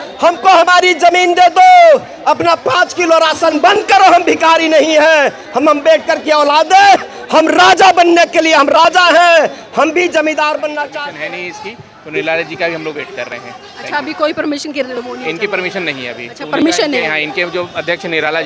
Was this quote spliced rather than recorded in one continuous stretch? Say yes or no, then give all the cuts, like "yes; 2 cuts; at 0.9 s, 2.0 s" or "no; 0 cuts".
yes; 1 cut; at 10.9 s